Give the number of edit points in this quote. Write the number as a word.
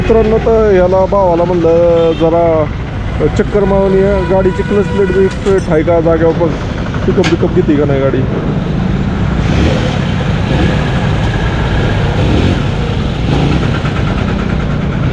zero